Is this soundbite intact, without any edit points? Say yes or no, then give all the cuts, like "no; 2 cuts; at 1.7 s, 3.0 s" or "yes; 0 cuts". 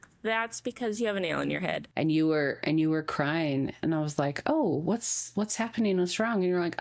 no; 1 cut; at 1.8 s